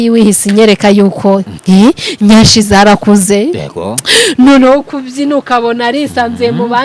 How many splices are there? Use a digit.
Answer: 1